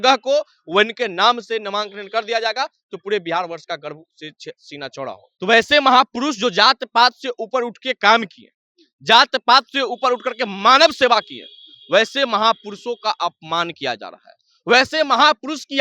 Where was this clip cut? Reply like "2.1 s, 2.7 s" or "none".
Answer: 5.2 s

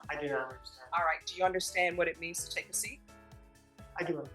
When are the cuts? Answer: none

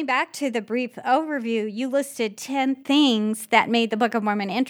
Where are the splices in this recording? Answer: none

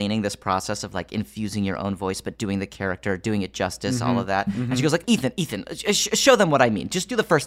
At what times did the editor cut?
5.0 s

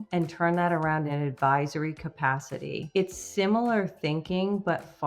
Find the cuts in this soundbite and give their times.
1.1 s, 2.8 s

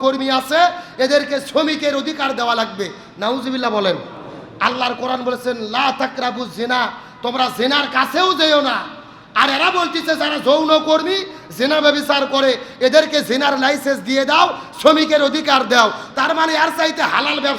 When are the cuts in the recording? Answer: none

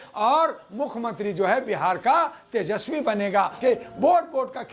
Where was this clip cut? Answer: 3.6 s

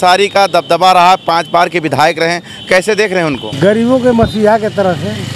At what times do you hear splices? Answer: 3.5 s

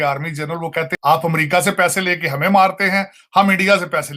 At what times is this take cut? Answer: 0.9 s

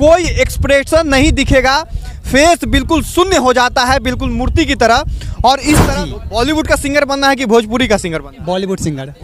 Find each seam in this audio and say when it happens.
5.8 s

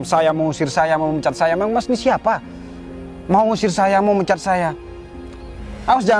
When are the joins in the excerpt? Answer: none

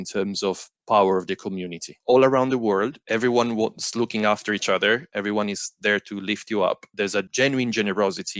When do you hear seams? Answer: none

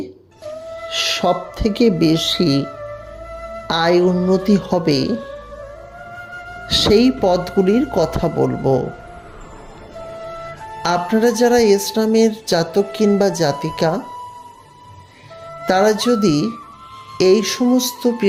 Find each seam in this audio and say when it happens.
none

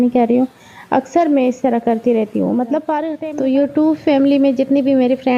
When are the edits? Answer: 3.2 s

